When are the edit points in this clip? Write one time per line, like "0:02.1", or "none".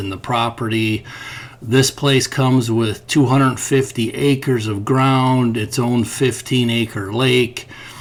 none

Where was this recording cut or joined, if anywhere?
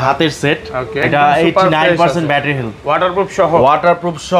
0:01.0

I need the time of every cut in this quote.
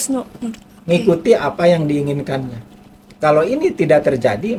none

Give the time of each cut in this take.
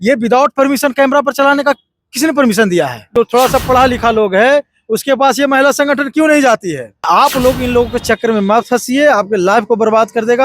0:03.0
0:07.1

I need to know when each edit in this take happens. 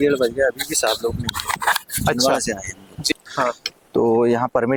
none

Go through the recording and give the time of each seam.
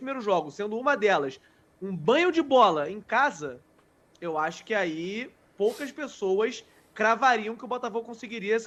none

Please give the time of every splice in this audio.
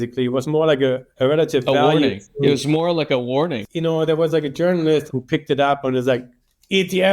0:01.1
0:03.6
0:05.1

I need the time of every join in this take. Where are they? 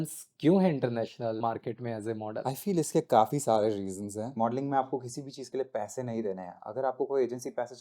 0:01.4
0:02.4
0:04.3

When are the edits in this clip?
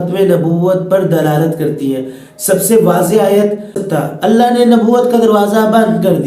0:04.0

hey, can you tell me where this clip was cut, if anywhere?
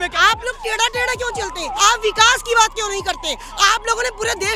0:01.8

